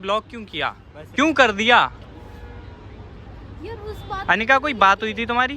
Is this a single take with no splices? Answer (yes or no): no